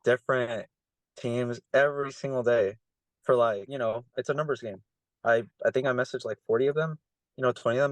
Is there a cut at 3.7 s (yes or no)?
yes